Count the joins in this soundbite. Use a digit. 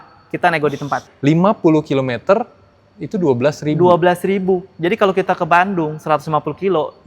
1